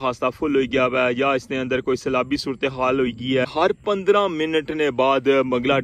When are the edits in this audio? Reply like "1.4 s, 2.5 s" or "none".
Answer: 3.5 s